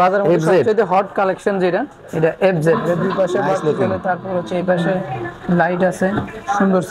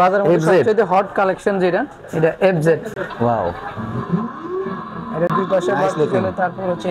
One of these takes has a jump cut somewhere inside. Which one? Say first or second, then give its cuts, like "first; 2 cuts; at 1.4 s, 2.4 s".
first; 1 cut; at 2.8 s